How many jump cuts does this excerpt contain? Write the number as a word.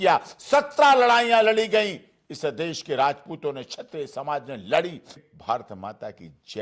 one